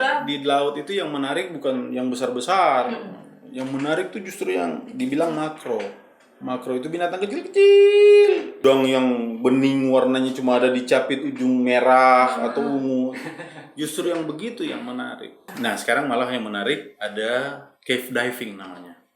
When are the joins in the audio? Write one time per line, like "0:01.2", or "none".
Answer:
0:08.6
0:15.5